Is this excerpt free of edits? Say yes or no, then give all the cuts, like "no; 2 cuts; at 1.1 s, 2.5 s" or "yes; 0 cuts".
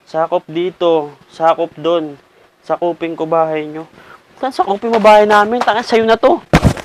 yes; 0 cuts